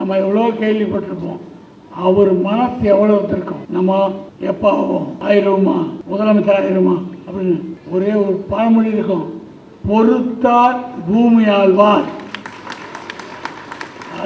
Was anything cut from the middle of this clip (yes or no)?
yes